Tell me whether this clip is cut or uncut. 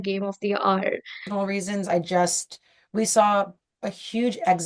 cut